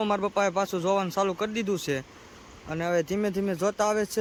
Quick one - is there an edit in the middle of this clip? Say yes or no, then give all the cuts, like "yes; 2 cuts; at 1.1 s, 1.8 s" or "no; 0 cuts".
no; 0 cuts